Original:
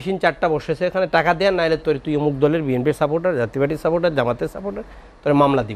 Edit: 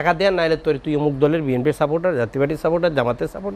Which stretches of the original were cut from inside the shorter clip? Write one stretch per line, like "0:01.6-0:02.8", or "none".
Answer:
none